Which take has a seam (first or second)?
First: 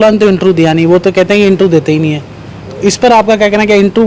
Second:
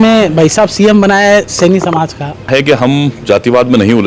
second